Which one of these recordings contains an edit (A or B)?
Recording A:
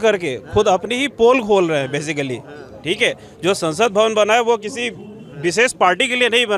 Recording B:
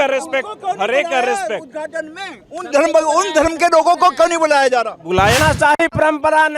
B